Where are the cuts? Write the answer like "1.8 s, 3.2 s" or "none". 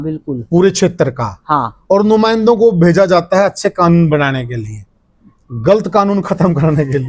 none